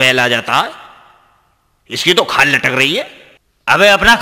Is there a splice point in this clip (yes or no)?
no